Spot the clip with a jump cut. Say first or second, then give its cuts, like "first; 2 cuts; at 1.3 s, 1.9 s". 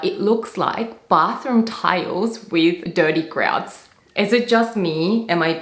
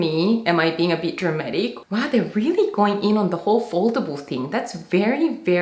second; 1 cut; at 1.8 s